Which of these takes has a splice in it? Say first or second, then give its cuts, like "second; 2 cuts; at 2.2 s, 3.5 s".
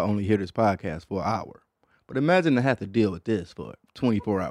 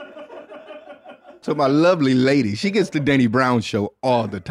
second; 1 cut; at 1.4 s